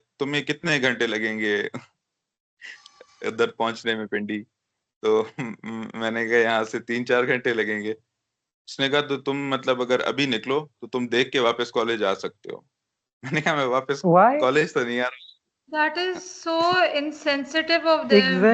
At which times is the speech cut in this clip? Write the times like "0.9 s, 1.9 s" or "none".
none